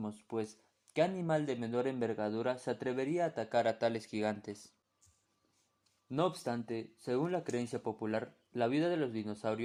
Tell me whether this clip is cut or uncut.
uncut